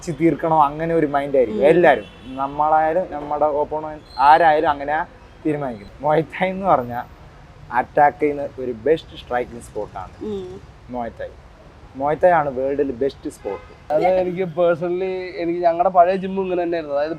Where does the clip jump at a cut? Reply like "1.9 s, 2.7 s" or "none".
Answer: 5.7 s, 13.9 s